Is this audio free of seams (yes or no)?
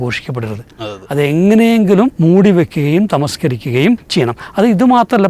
no